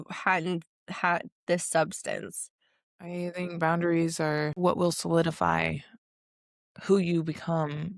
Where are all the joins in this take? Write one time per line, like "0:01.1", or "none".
0:02.9
0:04.6